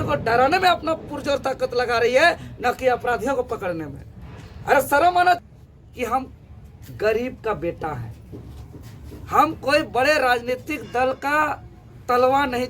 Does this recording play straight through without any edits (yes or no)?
no